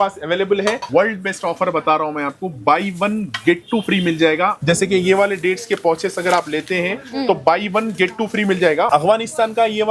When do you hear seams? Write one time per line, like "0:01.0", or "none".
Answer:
0:00.8
0:04.6
0:08.9